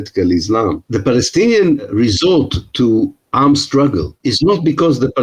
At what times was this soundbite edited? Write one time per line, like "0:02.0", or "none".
0:00.8
0:01.9
0:04.1